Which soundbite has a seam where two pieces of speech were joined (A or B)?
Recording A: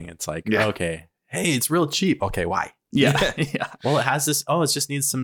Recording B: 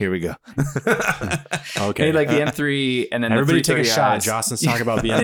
A